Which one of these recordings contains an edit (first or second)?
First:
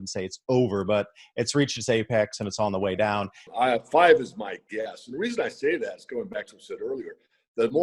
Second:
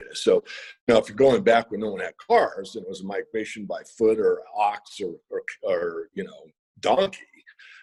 first